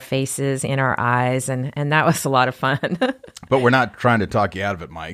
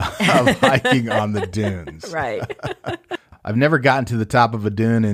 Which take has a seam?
second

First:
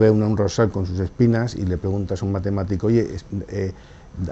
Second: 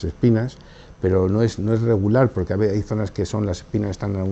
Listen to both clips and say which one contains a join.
second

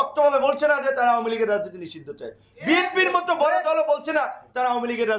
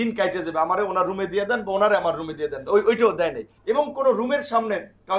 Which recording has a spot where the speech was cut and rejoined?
second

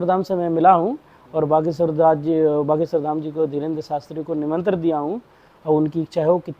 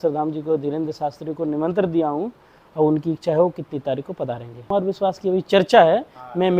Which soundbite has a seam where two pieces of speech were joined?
second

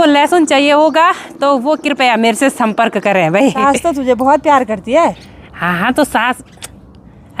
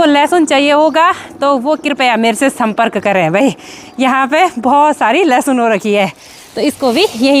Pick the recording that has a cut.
first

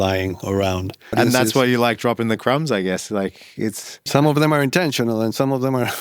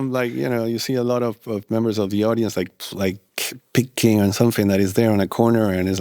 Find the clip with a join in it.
first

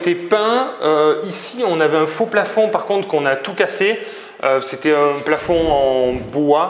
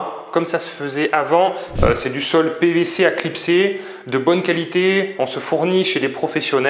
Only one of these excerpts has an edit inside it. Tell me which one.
second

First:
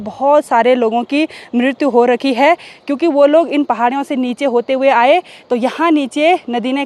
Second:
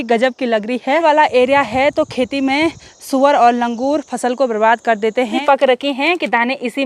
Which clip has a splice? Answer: second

